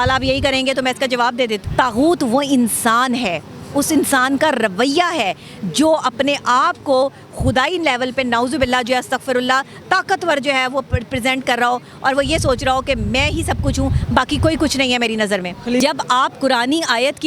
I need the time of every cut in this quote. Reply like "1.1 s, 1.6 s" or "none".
1.6 s, 15.8 s